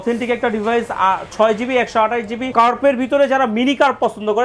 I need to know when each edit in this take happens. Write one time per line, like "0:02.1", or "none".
0:02.4